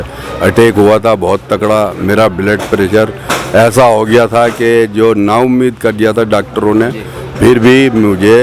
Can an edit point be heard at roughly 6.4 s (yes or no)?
no